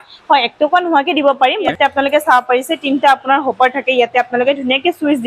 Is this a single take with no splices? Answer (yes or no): no